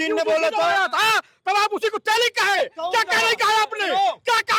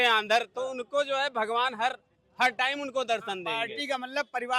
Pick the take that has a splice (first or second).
second